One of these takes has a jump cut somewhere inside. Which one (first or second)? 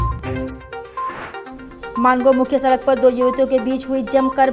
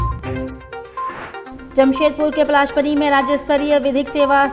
second